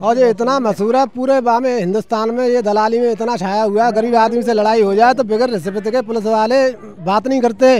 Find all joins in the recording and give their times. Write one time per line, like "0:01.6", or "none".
none

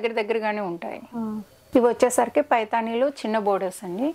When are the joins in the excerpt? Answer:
0:01.5

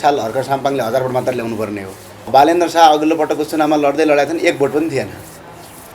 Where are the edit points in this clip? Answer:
0:02.3

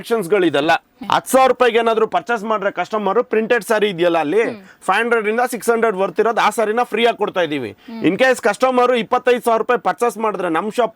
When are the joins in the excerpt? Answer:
0:00.9

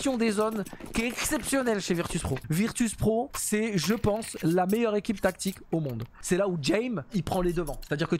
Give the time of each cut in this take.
0:02.4
0:03.4
0:06.1
0:07.1

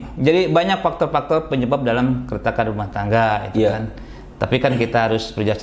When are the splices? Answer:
none

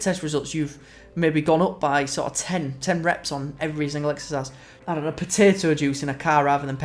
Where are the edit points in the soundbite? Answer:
0:04.7

